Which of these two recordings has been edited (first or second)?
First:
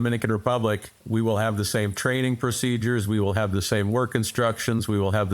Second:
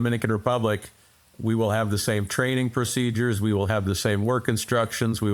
first